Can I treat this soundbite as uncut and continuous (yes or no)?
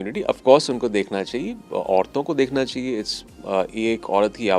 yes